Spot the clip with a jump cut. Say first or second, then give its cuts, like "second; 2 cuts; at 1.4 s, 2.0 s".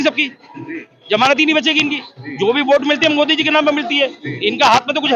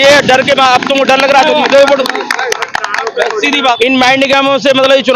second; 1 cut; at 3.8 s